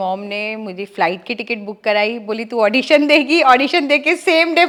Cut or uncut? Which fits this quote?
uncut